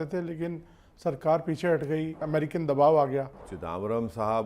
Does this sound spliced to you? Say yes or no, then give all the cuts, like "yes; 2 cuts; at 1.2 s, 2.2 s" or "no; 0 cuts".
yes; 2 cuts; at 2.2 s, 3.5 s